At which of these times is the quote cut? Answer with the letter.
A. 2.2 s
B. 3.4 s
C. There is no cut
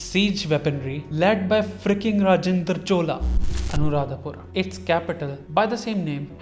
B